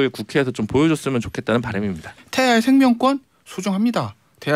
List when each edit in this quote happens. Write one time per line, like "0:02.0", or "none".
0:02.1